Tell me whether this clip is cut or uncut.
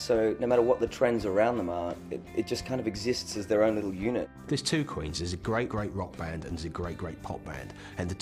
cut